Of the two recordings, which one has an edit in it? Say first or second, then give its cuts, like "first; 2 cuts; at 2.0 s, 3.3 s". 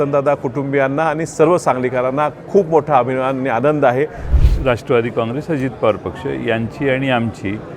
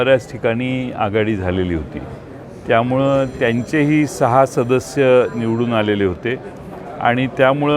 first; 1 cut; at 4.3 s